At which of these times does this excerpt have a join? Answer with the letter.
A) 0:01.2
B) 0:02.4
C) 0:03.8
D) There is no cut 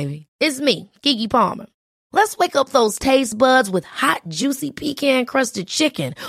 D